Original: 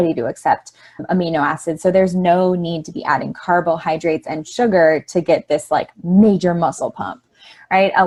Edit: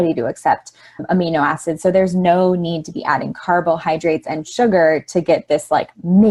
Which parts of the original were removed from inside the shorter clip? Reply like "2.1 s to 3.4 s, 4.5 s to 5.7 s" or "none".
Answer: none